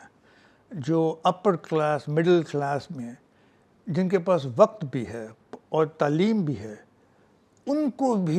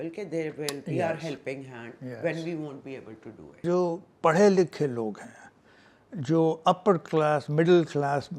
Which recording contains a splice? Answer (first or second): second